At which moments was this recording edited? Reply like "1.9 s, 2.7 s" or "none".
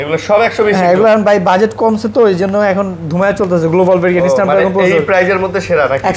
none